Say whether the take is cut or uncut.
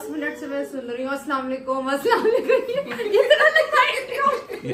uncut